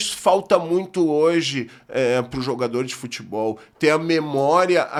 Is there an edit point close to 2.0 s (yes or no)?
no